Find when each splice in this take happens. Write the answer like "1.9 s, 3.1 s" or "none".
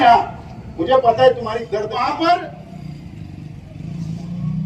1.9 s